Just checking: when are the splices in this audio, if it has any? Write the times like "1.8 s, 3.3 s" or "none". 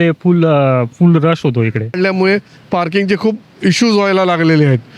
2.0 s